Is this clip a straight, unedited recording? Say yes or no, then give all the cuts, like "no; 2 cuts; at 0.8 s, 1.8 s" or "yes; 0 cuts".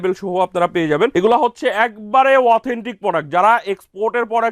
no; 1 cut; at 1.1 s